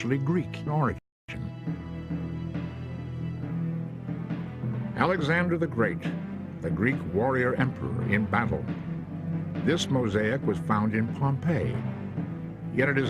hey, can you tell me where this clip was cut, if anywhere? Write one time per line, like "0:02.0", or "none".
0:08.2